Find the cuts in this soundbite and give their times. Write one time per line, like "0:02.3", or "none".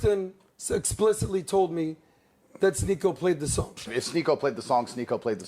none